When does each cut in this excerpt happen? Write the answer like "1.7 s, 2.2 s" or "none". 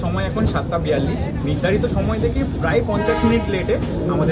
none